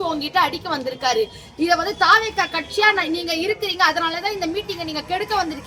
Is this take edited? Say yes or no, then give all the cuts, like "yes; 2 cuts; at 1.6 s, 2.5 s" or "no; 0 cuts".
no; 0 cuts